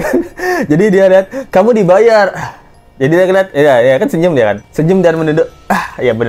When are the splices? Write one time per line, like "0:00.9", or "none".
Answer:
none